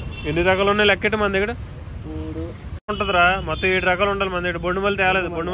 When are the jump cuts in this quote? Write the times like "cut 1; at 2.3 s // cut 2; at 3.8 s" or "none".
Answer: cut 1; at 2.9 s